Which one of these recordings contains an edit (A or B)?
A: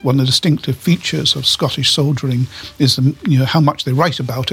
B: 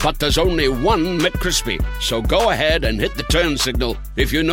A